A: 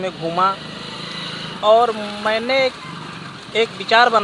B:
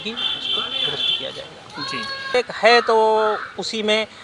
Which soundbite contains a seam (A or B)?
B